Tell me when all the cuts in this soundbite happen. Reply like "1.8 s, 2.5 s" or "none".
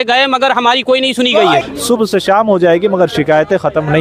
1.6 s